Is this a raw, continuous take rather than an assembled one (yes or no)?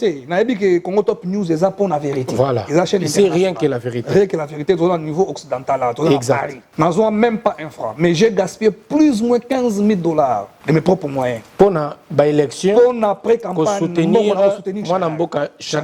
no